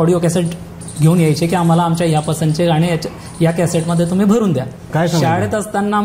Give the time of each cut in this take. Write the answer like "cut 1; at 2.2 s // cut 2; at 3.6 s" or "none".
cut 1; at 4.8 s